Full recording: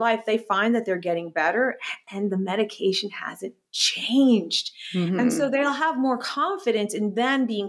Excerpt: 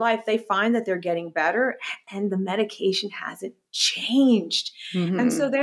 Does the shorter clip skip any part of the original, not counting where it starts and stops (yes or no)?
no